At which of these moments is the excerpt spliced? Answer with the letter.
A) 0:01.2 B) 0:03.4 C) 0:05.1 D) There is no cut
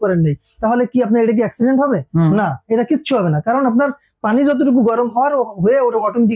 D